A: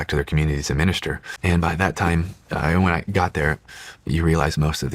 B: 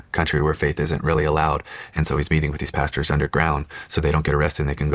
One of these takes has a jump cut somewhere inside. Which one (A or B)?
A